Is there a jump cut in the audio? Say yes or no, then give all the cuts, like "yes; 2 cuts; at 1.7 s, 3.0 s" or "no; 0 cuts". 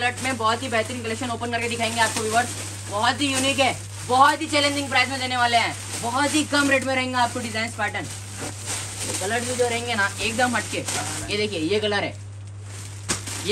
no; 0 cuts